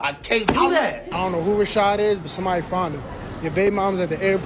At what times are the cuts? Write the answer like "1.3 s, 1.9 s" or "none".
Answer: 1.1 s